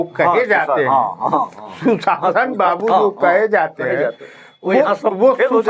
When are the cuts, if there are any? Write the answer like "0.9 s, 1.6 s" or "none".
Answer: none